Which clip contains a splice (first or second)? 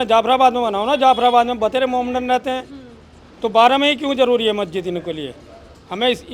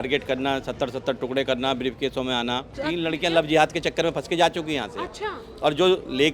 second